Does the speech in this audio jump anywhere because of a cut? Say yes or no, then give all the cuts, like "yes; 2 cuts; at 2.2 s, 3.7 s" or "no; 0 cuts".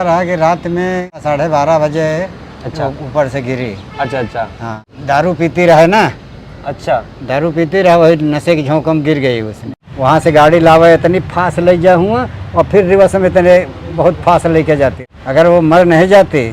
yes; 4 cuts; at 1.2 s, 4.9 s, 9.6 s, 15.1 s